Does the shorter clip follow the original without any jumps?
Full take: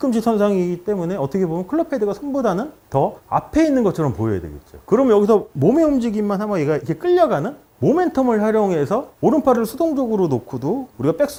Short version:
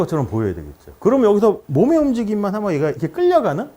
yes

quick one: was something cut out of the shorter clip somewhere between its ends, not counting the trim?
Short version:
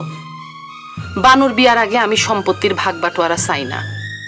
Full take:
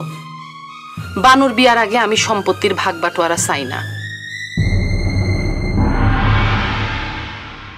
no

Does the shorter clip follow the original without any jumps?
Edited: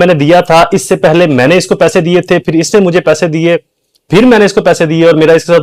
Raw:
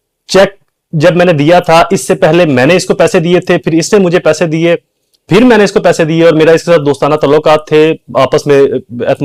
yes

